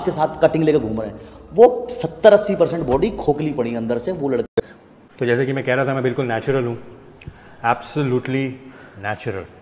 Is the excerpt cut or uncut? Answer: cut